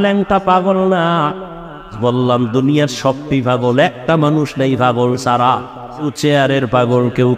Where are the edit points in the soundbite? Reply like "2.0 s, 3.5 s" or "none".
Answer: 1.9 s, 6.1 s